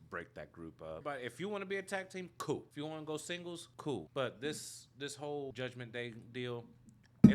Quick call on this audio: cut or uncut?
cut